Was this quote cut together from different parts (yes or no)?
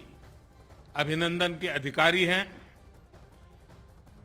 yes